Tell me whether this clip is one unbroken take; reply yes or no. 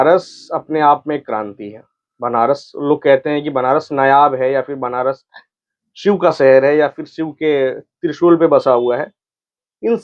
yes